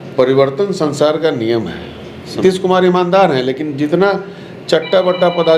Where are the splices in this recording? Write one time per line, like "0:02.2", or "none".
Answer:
0:02.3